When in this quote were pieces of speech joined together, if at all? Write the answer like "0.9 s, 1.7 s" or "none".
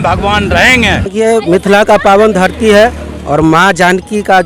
1.1 s